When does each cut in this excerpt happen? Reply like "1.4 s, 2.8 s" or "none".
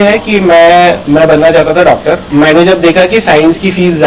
1.0 s, 2.2 s